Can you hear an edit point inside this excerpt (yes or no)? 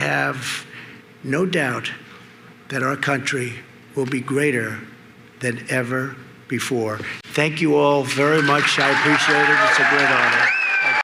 no